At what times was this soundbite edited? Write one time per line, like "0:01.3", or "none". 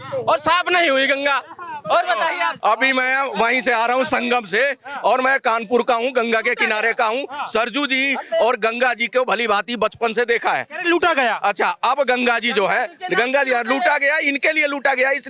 none